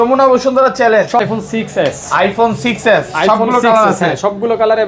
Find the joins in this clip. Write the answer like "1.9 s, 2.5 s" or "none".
1.2 s